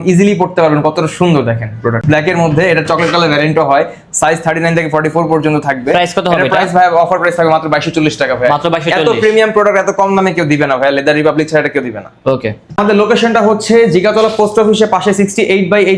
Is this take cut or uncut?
uncut